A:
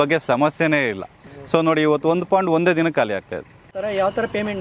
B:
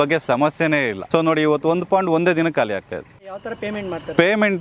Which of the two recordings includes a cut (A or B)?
B